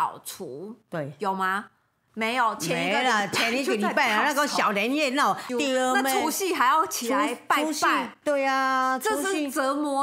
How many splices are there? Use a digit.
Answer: 1